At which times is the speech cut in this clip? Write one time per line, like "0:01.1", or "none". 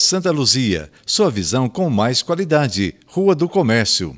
none